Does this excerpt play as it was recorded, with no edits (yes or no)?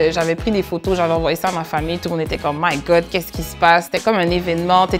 yes